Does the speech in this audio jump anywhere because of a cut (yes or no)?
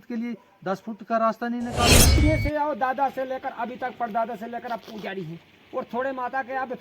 yes